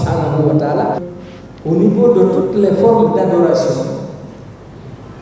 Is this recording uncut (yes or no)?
no